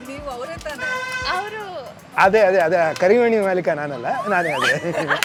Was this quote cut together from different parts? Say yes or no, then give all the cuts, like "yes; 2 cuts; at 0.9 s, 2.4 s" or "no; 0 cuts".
no; 0 cuts